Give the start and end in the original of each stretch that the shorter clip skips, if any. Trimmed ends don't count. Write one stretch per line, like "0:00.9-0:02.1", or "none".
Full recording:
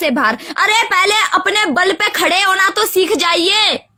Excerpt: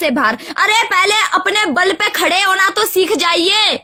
none

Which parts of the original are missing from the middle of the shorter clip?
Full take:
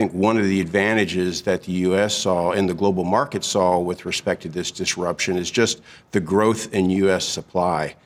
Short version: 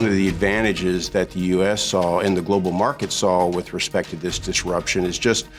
none

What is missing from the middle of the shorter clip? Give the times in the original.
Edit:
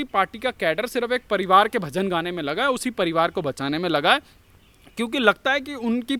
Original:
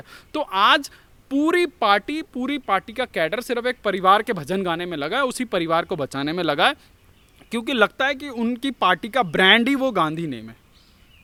none

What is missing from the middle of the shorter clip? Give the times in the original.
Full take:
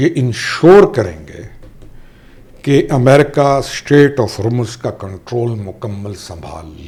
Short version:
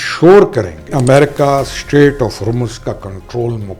0:01.3-0:02.9

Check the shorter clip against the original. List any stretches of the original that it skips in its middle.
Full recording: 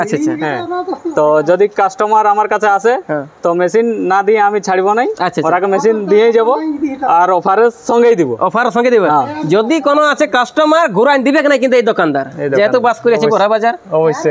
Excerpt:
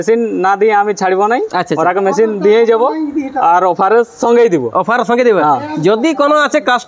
none

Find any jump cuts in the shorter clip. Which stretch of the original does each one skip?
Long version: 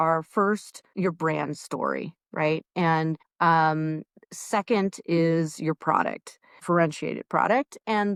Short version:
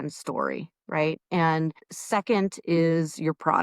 0:03.3-0:04.2

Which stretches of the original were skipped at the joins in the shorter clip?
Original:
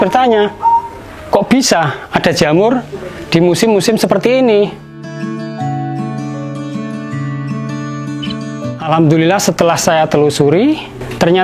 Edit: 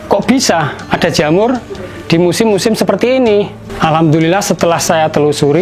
0:04.9-0:08.6

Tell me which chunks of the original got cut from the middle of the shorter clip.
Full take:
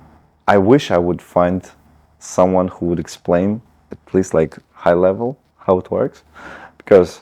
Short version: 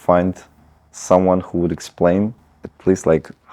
none

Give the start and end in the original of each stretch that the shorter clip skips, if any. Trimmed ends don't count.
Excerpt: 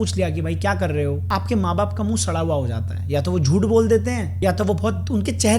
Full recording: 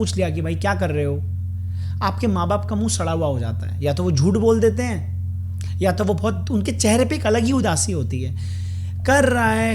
0:01.2-0:01.9
0:05.0-0:05.7

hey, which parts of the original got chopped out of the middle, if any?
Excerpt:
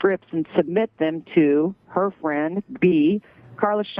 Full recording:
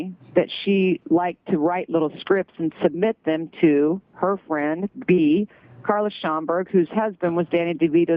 none

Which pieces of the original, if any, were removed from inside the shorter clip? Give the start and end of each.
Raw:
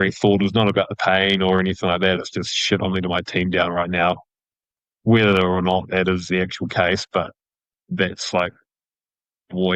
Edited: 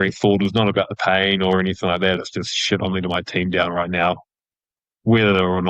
none

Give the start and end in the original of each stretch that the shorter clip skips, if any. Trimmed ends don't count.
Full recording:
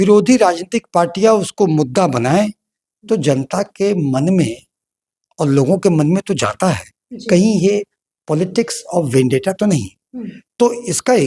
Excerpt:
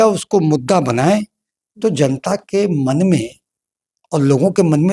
none

